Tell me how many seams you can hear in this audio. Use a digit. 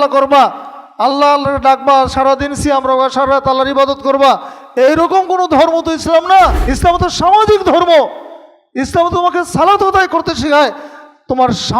1